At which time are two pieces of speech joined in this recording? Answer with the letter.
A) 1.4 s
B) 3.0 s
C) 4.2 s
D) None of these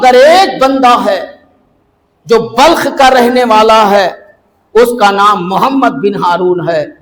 D